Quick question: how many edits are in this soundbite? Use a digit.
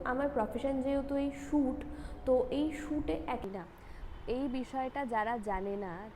1